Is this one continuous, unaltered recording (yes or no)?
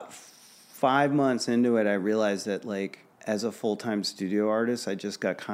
no